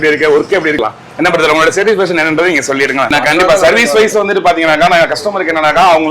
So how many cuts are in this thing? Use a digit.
2